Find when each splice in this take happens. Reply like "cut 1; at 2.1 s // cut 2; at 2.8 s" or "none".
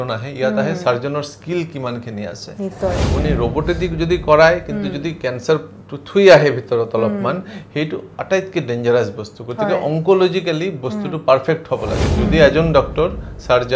cut 1; at 3.1 s